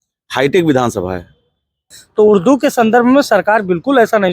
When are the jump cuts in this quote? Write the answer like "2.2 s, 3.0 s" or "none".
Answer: 2.0 s